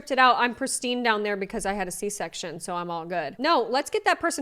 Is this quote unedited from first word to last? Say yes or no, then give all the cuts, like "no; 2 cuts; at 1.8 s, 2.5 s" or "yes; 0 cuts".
no; 1 cut; at 3.3 s